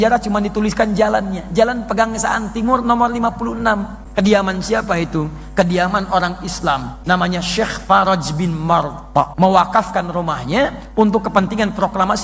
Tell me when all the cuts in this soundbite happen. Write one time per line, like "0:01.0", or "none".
0:04.0
0:06.9
0:09.3